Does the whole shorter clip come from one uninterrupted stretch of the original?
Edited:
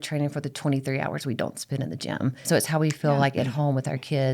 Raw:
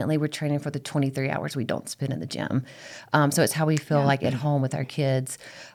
no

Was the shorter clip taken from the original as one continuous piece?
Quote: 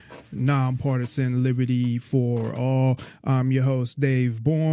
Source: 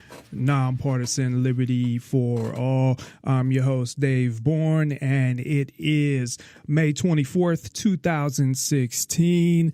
yes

